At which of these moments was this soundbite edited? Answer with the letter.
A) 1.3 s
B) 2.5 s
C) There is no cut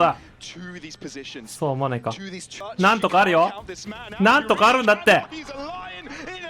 B